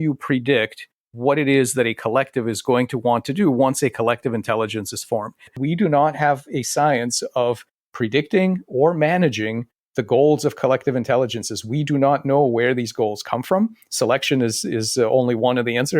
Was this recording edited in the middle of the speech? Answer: yes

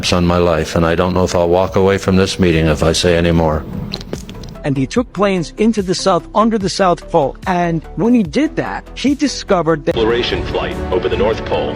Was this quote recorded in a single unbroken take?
no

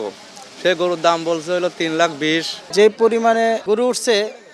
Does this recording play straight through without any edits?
no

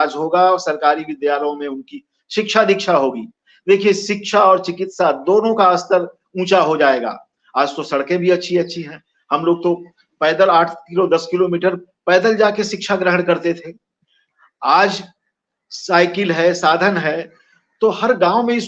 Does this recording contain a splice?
no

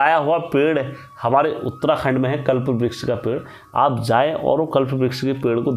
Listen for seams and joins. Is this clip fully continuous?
yes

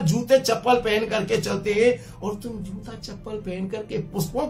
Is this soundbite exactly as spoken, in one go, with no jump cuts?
yes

